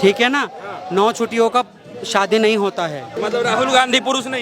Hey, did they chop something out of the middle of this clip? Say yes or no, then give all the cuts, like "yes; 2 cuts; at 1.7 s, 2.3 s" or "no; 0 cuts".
yes; 1 cut; at 3.1 s